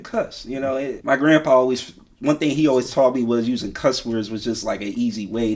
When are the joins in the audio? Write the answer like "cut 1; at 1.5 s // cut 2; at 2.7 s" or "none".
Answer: cut 1; at 1.0 s